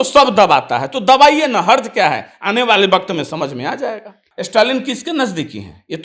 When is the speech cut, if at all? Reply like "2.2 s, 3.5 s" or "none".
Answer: 4.3 s